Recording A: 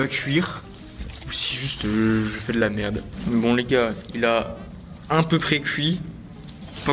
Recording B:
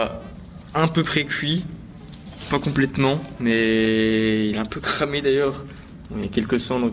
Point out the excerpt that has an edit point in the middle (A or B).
A